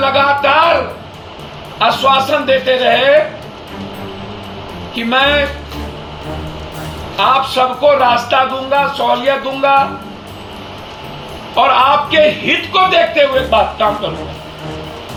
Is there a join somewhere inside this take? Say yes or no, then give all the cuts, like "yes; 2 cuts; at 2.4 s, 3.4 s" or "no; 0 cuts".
no; 0 cuts